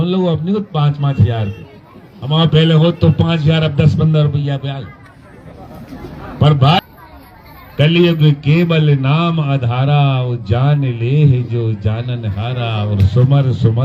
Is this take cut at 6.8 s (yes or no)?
yes